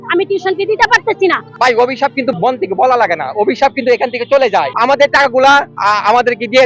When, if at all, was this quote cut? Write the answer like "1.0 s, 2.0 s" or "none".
1.5 s, 2.3 s, 4.7 s, 5.7 s